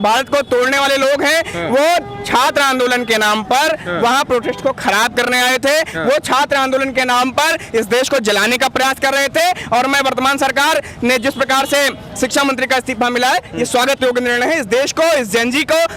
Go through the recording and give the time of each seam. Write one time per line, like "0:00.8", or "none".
none